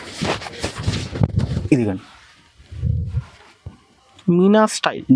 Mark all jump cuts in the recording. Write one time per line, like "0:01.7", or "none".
none